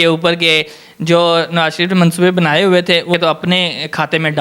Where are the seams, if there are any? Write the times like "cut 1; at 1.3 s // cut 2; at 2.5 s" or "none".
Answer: cut 1; at 3.1 s